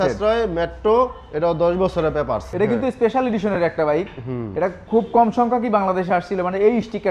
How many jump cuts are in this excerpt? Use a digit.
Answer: 1